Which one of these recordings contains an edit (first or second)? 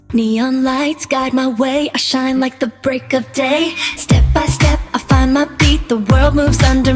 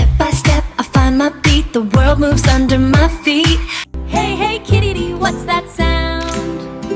second